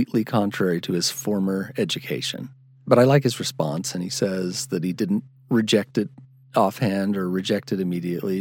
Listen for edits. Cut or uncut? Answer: uncut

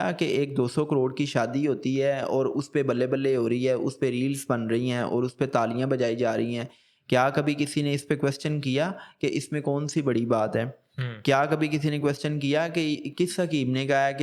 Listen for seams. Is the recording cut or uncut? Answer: uncut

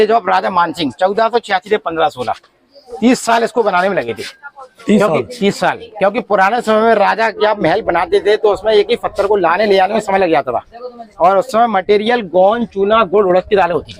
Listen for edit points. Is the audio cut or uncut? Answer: uncut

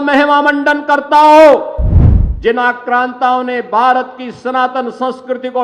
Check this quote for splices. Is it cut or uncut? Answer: uncut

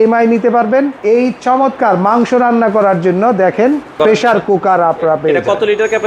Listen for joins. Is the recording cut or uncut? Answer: cut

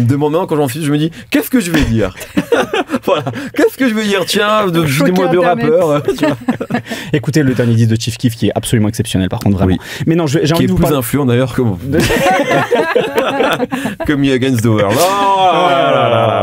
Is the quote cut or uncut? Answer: uncut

